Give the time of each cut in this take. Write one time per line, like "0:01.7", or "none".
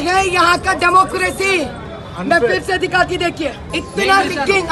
0:03.6